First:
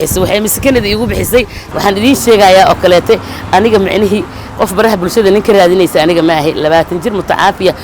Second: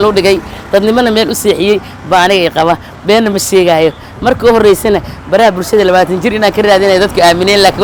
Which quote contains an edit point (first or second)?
first